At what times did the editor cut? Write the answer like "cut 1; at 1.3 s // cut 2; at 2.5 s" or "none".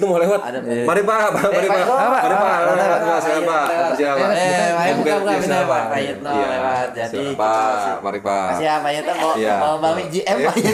none